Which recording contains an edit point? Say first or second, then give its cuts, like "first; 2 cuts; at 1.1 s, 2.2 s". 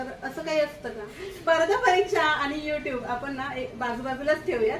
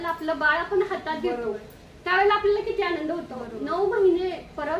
first; 1 cut; at 1.1 s